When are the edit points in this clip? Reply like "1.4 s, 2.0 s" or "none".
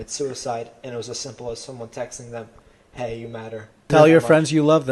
3.8 s